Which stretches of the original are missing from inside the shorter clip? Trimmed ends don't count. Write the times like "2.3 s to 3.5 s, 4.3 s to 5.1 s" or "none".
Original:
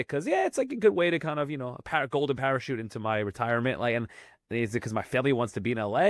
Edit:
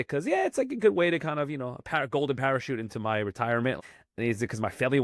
3.8 s to 4.1 s